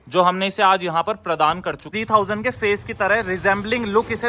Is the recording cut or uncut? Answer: cut